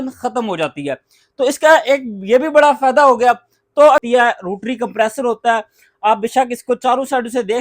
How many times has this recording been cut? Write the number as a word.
one